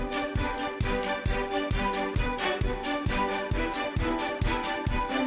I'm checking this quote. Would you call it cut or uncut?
cut